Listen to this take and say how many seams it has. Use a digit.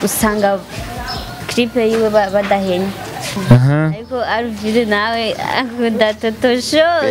0